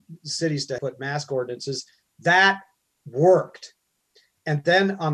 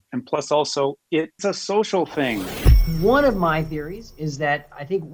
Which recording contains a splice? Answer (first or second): second